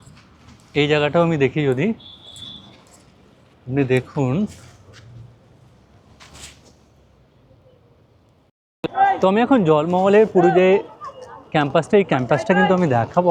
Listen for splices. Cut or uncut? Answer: cut